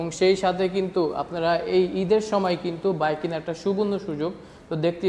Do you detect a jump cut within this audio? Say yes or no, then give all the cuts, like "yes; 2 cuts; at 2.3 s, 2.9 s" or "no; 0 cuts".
no; 0 cuts